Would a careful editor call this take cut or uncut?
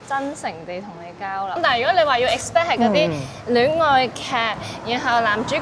cut